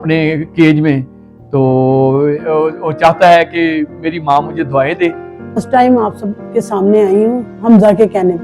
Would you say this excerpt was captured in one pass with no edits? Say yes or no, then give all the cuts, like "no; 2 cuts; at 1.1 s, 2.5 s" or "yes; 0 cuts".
no; 1 cut; at 5.6 s